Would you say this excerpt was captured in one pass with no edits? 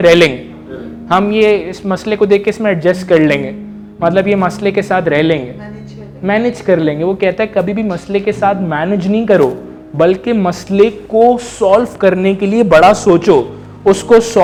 yes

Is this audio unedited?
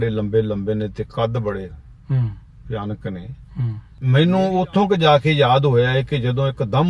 no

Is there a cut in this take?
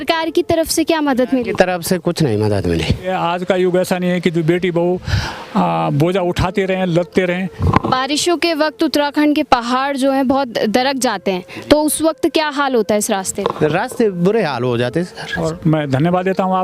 yes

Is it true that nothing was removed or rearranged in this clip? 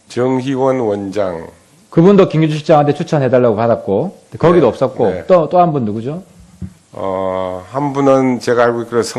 no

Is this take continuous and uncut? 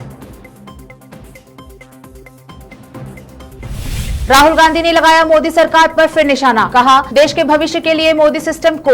no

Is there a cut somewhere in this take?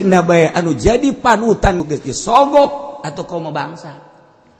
yes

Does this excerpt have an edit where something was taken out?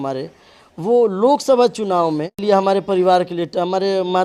no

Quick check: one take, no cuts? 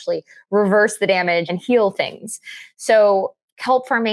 no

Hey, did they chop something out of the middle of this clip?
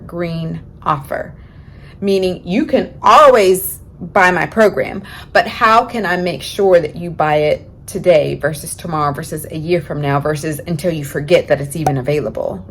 no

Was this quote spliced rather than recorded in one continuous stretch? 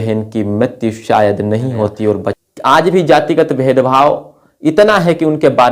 yes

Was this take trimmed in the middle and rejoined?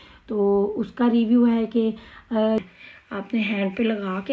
yes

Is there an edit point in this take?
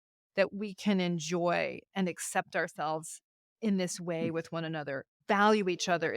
yes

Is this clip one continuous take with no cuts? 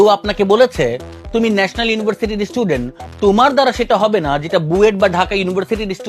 yes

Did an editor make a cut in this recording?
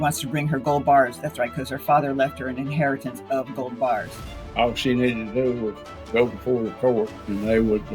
yes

